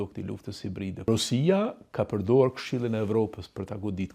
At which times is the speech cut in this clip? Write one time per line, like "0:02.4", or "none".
0:01.1